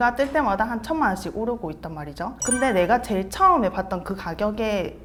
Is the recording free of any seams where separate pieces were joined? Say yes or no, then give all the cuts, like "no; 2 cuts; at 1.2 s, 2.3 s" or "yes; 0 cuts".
yes; 0 cuts